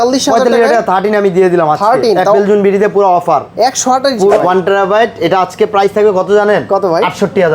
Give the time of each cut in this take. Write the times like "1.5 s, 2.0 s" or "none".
4.4 s